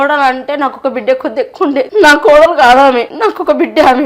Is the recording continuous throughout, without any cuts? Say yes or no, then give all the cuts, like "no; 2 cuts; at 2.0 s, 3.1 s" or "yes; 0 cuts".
no; 2 cuts; at 1.9 s, 3.1 s